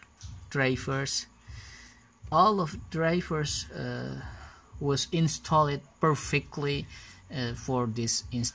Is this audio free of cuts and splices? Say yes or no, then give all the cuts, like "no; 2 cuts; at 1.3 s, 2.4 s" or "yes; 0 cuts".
yes; 0 cuts